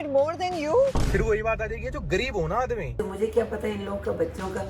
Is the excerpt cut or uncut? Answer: cut